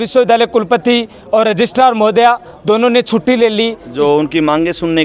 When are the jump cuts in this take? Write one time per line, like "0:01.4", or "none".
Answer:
0:03.8